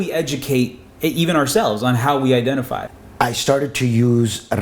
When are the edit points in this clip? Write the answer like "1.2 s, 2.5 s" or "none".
2.8 s